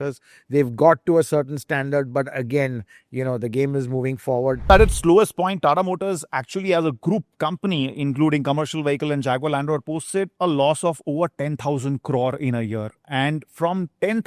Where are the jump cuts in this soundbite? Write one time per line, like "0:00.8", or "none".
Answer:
0:04.7